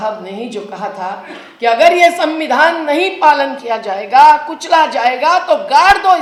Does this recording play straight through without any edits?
yes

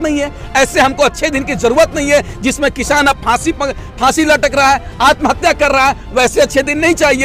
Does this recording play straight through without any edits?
yes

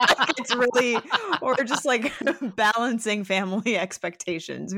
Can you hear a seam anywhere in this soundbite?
no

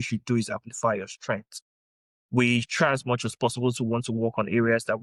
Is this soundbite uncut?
yes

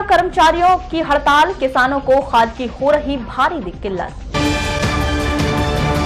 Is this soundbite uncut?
yes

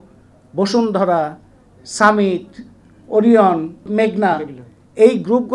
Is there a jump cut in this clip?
yes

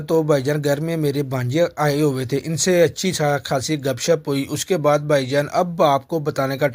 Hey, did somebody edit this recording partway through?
no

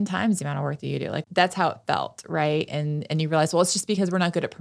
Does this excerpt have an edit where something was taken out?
yes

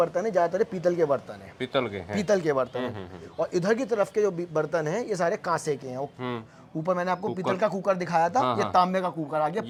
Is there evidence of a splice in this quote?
no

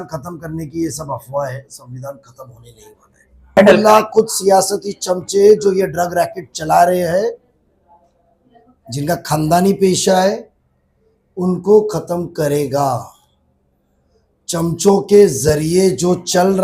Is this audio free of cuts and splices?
no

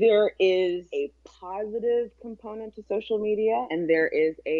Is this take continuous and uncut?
no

